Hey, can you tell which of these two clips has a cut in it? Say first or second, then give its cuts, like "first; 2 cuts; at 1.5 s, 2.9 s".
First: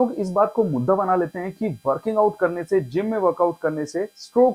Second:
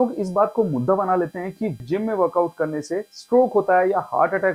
second; 1 cut; at 1.8 s